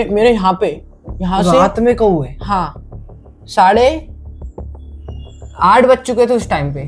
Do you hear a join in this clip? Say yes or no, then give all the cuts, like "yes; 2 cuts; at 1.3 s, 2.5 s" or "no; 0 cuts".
no; 0 cuts